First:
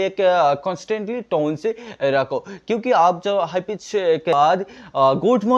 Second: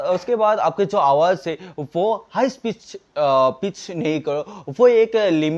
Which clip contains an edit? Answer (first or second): first